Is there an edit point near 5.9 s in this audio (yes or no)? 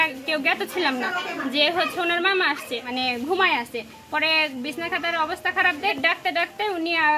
yes